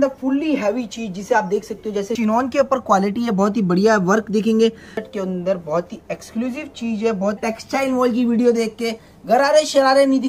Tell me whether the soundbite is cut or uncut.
cut